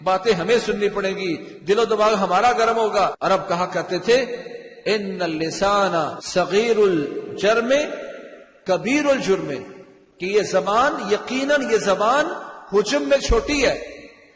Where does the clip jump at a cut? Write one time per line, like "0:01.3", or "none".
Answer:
0:03.2
0:06.2